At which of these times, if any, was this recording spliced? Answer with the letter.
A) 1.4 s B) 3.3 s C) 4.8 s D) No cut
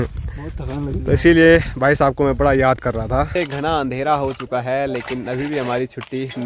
B